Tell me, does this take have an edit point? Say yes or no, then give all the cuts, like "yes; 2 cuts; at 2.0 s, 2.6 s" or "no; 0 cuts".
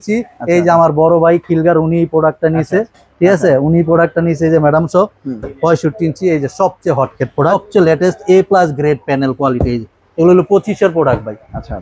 yes; 1 cut; at 7.5 s